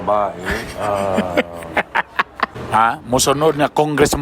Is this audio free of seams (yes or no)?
no